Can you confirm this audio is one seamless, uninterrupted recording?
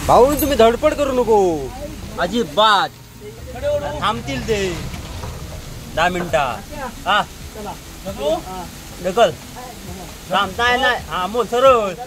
yes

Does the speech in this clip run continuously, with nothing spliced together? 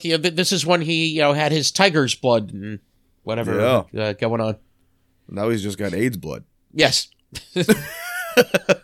yes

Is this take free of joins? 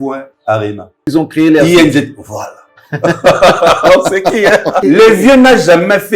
no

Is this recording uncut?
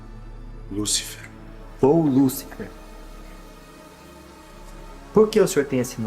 no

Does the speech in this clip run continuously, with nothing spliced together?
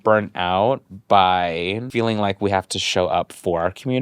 no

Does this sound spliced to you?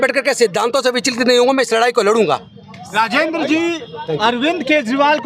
no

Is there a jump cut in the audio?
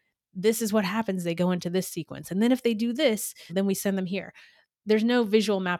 yes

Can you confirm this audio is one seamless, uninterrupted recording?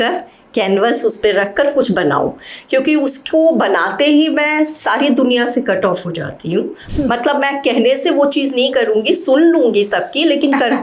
no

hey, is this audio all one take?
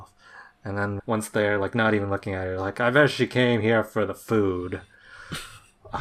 no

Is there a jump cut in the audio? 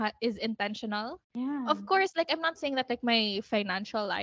no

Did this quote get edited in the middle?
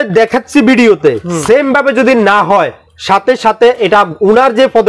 no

